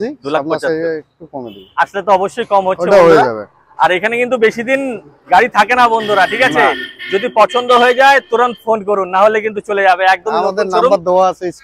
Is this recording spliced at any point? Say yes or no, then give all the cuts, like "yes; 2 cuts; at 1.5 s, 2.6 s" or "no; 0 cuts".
no; 0 cuts